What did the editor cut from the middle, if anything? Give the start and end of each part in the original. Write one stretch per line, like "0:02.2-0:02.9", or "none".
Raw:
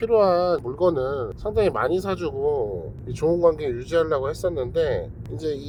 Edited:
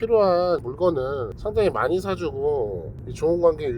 none